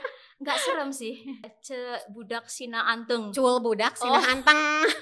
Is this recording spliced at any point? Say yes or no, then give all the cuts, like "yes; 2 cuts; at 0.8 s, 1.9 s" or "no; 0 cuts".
yes; 1 cut; at 1.5 s